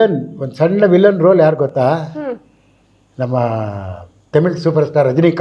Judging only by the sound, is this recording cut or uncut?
cut